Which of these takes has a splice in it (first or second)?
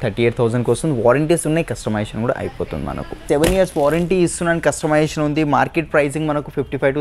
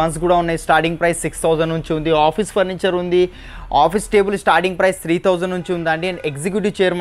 first